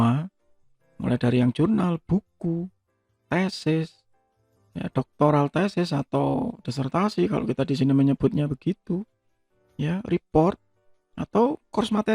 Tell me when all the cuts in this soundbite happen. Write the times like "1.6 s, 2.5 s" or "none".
none